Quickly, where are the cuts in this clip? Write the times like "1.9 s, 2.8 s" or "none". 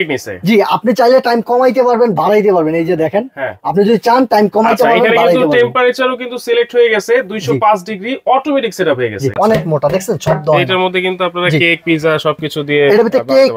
9.3 s